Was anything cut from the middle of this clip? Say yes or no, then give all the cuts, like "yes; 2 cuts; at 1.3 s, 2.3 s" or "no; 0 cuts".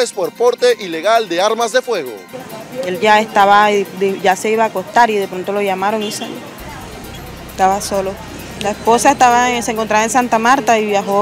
yes; 1 cut; at 2.2 s